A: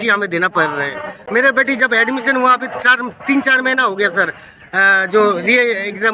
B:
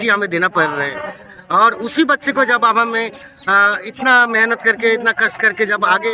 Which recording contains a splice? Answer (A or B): A